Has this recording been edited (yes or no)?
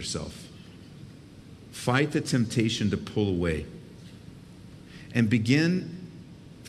yes